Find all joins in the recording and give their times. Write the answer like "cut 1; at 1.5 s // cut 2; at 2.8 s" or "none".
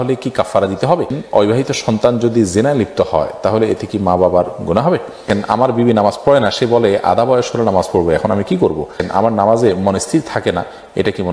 cut 1; at 1.2 s // cut 2; at 5.3 s // cut 3; at 9.0 s